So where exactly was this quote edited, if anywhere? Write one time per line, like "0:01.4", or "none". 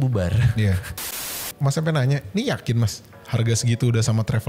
0:01.3

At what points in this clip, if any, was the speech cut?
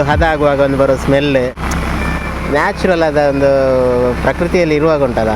0:01.6

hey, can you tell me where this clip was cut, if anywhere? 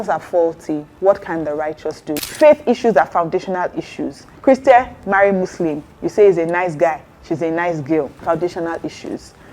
0:00.9
0:02.2
0:04.2
0:08.1

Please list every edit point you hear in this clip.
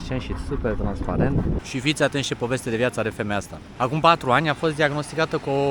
0:01.6
0:03.6

